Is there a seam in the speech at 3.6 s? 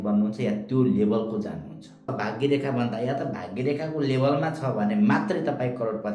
no; 1 cut; at 2.1 s

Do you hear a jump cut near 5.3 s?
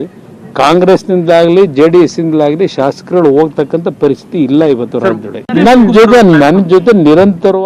no; 1 cut; at 6.7 s

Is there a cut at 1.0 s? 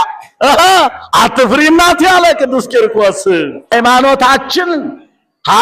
no; 1 cut; at 3.7 s

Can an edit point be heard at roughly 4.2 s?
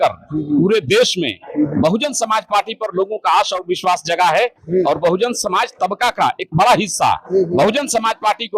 no; 0 cuts

